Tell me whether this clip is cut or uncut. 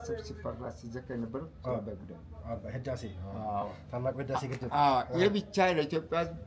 uncut